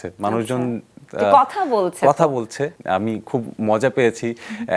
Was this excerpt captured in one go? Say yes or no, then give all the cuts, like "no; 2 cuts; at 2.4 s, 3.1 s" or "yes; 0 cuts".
no; 1 cut; at 2.8 s